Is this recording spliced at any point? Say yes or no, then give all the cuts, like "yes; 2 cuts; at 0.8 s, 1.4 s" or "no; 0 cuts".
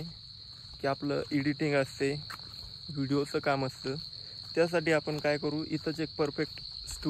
no; 0 cuts